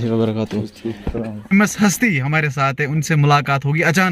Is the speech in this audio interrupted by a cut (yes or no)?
yes